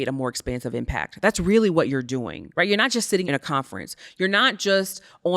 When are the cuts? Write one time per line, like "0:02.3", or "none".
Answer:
0:02.4
0:03.2